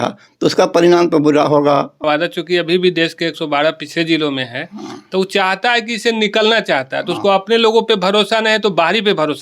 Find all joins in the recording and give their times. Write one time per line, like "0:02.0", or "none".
0:02.0